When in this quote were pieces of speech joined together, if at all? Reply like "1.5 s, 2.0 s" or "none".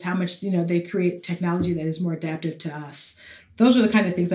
3.4 s

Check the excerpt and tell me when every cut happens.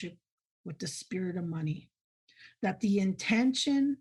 none

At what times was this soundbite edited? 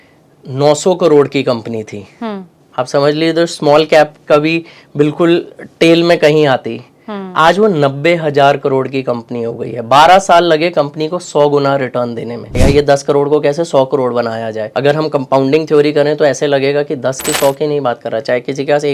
12.6 s, 14.6 s

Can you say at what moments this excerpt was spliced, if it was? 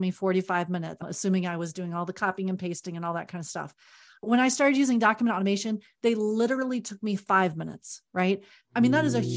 1.1 s, 4.2 s

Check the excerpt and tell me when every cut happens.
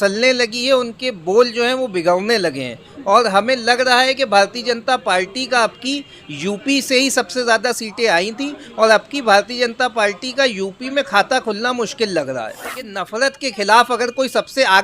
13.0 s

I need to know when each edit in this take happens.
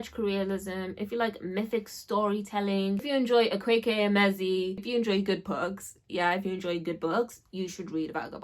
3.0 s, 4.8 s

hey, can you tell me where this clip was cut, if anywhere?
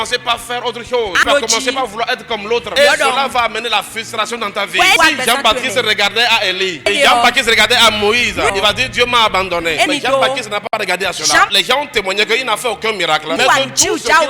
1.2 s, 2.7 s, 5.0 s, 6.9 s, 8.5 s, 9.9 s, 11.5 s, 13.4 s

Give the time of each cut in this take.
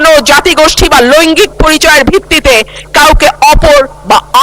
none

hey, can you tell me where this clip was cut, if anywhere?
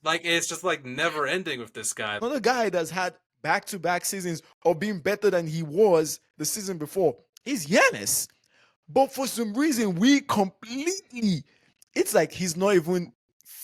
2.2 s

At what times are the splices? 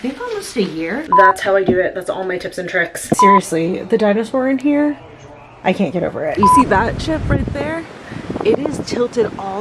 1.1 s, 3.2 s, 6.3 s

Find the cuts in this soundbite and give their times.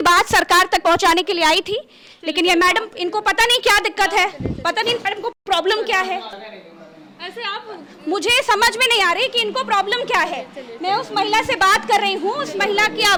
none

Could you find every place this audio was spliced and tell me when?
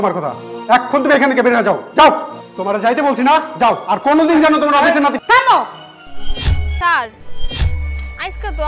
6.6 s

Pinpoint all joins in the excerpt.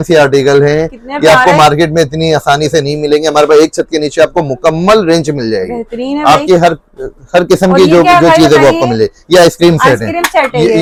none

